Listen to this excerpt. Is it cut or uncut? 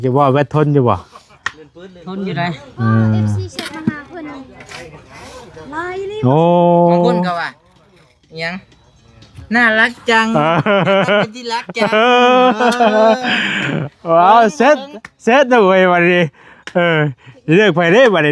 uncut